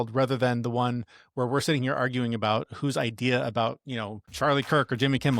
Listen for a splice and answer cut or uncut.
cut